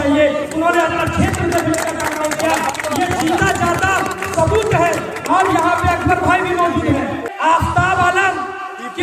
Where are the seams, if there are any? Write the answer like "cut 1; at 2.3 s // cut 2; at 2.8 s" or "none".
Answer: cut 1; at 7.3 s

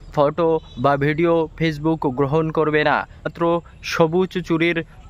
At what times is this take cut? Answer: cut 1; at 3.3 s

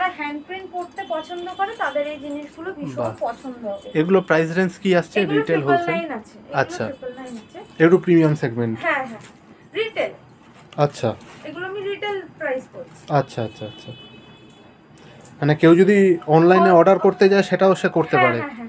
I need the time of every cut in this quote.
none

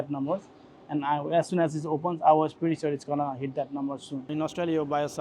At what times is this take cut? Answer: cut 1; at 4.3 s

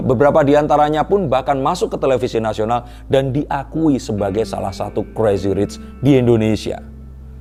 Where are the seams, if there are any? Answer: none

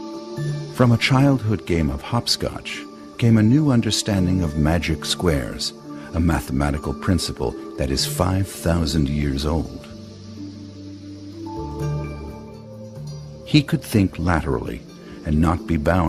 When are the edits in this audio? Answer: none

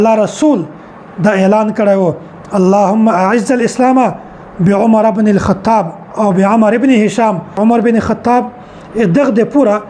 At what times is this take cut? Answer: cut 1; at 7.6 s

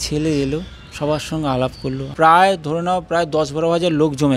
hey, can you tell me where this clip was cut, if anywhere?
cut 1; at 2.1 s

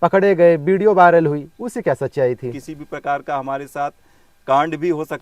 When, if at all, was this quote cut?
cut 1; at 2.7 s

